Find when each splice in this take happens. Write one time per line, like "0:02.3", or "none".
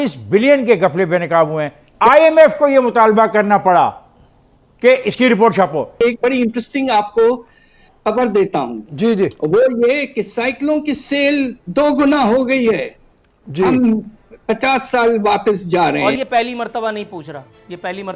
0:02.0
0:05.9
0:16.1